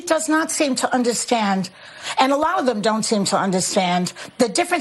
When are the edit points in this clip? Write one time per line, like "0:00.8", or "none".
none